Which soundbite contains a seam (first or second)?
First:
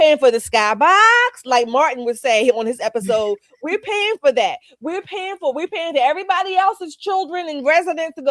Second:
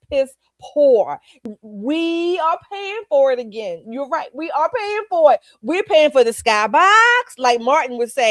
second